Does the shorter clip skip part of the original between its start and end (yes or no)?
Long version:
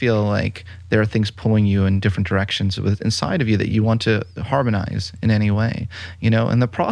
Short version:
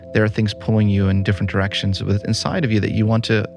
no